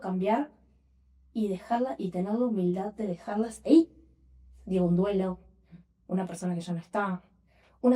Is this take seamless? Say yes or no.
yes